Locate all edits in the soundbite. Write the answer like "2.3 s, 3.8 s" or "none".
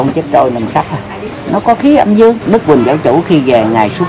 2.4 s